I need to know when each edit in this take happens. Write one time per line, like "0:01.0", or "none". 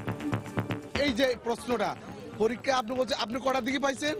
0:00.9